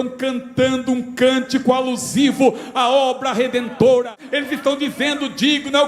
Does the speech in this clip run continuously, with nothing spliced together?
no; 1 cut; at 4.2 s

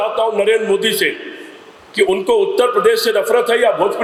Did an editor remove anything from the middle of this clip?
no; 0 cuts

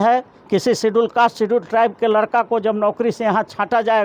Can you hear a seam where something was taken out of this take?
no; 0 cuts

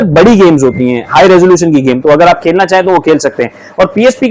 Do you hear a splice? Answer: no; 0 cuts

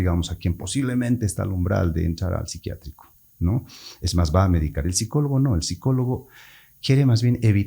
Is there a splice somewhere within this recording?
no; 0 cuts

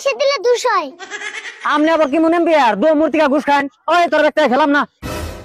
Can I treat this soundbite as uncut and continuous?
yes; 0 cuts

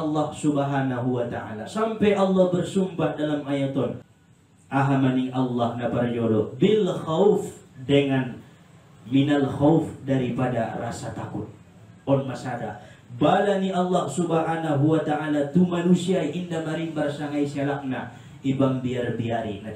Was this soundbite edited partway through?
yes; 1 cut; at 4.1 s

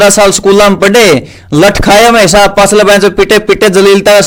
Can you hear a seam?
no; 0 cuts

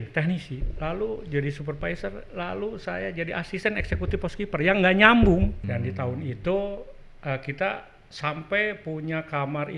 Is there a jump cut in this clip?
yes; 1 cut; at 5.6 s

